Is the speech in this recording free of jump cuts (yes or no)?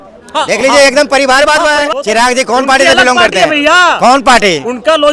no